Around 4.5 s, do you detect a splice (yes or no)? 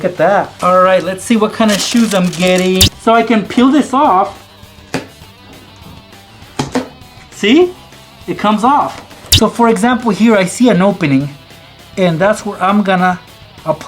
no